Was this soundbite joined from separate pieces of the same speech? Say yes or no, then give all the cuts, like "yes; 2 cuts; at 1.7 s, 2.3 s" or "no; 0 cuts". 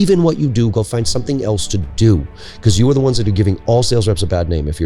no; 0 cuts